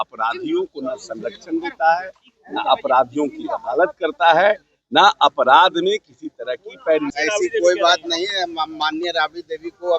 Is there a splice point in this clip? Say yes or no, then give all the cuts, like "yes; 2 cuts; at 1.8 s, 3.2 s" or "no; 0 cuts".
yes; 1 cut; at 7.1 s